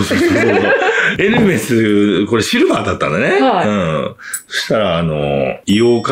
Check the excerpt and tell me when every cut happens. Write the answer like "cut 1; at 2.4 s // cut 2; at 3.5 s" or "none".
none